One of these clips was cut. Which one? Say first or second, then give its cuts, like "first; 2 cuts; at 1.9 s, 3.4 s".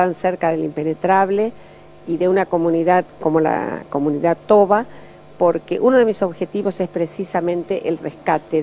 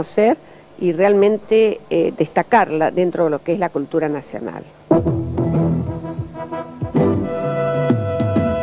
first; 1 cut; at 5.6 s